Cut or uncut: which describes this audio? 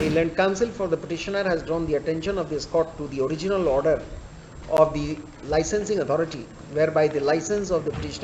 uncut